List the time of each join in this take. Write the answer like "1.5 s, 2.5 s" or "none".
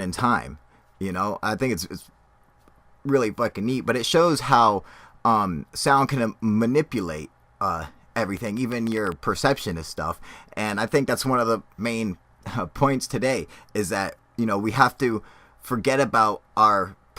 12.5 s